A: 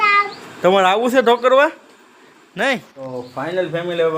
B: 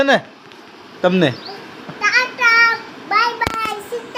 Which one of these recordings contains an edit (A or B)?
A